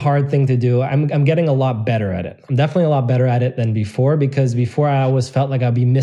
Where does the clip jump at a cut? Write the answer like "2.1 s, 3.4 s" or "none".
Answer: none